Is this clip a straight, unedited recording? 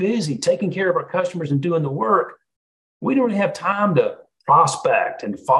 yes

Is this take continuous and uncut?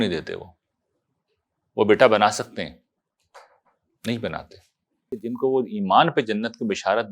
no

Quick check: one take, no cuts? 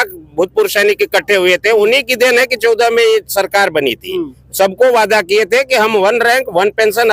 yes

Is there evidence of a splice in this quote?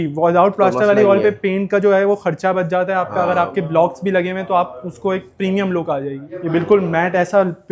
yes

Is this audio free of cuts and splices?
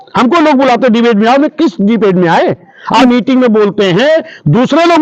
no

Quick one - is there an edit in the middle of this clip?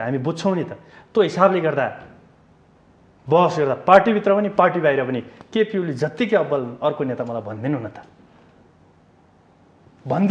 no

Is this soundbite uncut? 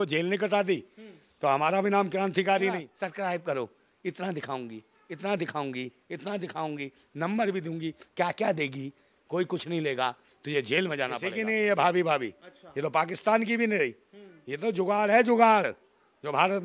no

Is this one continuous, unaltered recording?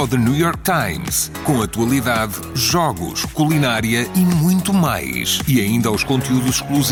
yes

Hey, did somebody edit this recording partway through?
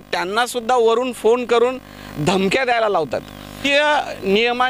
yes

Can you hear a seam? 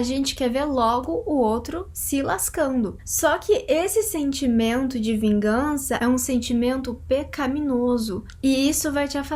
yes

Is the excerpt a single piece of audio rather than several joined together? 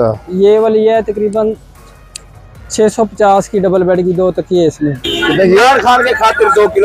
no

